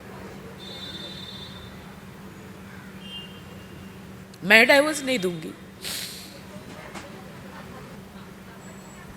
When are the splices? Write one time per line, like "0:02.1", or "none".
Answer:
0:08.0